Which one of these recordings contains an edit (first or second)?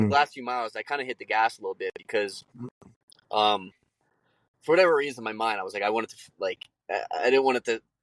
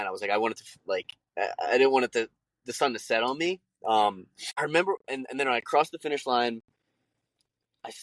second